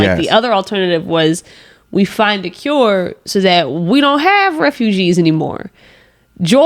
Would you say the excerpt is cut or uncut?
uncut